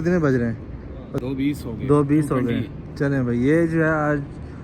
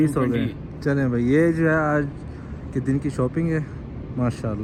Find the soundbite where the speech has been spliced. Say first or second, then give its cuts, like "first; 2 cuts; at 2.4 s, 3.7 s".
first; 1 cut; at 1.1 s